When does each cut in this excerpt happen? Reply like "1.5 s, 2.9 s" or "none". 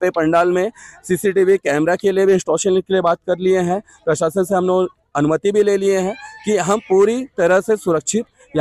none